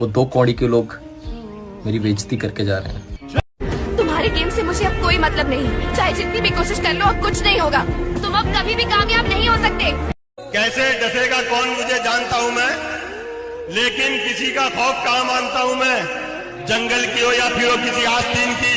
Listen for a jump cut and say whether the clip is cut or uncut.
uncut